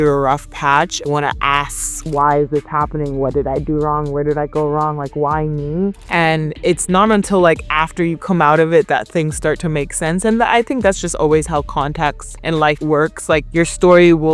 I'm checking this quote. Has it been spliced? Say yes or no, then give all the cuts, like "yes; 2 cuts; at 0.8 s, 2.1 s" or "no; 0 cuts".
no; 0 cuts